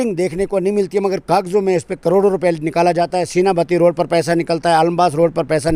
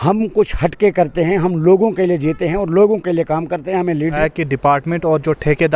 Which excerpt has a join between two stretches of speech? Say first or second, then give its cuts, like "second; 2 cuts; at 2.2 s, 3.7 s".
second; 1 cut; at 4.2 s